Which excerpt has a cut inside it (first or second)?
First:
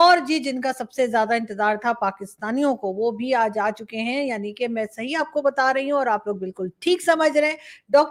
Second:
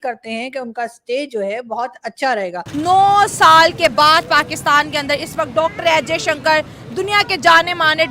second